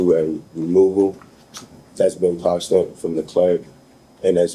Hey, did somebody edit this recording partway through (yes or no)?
no